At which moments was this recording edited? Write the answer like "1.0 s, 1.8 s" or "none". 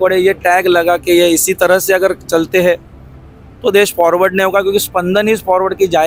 none

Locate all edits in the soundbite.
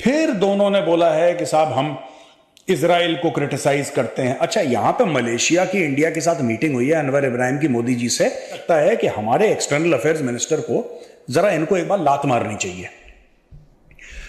8.6 s

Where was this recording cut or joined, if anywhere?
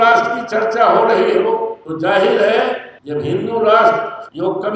none

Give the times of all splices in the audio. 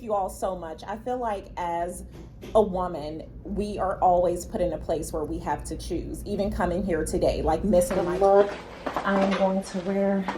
8.0 s

